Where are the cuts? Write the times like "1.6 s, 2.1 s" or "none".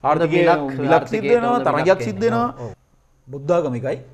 2.7 s